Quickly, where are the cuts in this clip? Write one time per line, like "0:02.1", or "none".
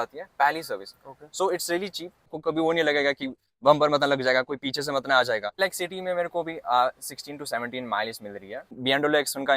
0:02.4
0:05.5
0:08.8